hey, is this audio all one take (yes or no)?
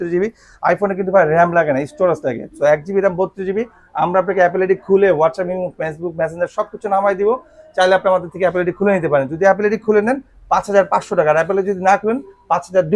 yes